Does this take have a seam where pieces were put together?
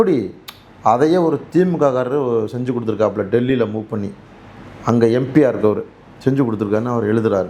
no; 0 cuts

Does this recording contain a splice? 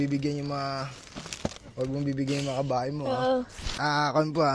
yes; 1 cut; at 3.6 s

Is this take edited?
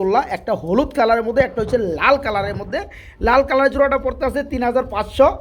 no; 0 cuts

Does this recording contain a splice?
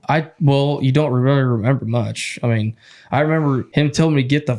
yes; 1 cut; at 3.7 s

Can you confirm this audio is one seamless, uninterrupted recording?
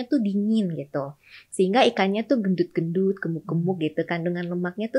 yes; 0 cuts

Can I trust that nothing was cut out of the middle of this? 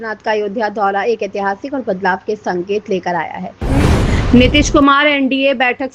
no; 1 cut; at 3.7 s

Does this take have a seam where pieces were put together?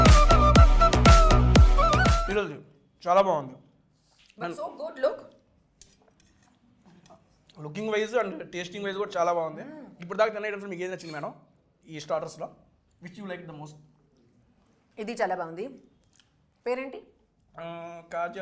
no; 0 cuts

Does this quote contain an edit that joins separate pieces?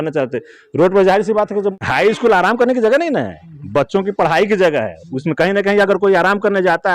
yes; 1 cut; at 1.8 s

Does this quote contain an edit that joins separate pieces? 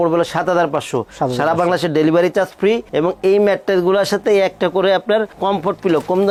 no; 0 cuts

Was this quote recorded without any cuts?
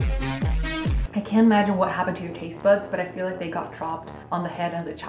no; 2 cuts; at 1.0 s, 4.1 s

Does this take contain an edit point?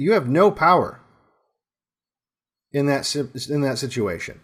no; 0 cuts

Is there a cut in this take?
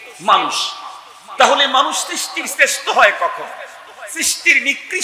no; 0 cuts

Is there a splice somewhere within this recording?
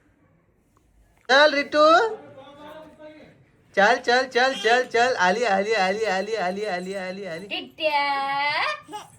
yes; 1 cut; at 1.3 s

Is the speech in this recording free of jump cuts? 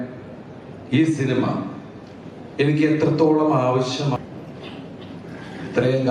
no; 1 cut; at 4.2 s

